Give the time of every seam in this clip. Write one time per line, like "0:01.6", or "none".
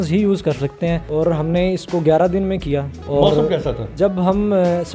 0:01.0
0:03.0
0:03.8